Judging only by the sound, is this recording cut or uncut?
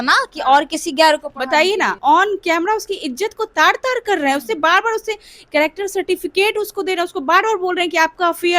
cut